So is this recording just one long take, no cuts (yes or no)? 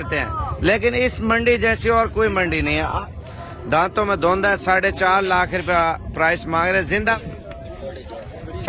no